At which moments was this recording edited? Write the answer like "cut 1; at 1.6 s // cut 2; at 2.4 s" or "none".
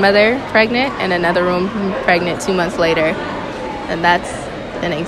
cut 1; at 3.4 s